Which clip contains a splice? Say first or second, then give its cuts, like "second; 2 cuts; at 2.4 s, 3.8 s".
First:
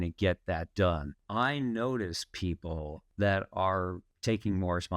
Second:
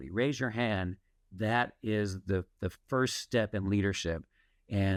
first; 3 cuts; at 1.1 s, 3.0 s, 4.1 s